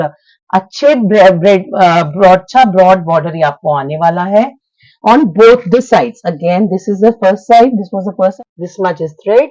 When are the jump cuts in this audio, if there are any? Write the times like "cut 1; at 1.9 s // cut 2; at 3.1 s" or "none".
cut 1; at 8.3 s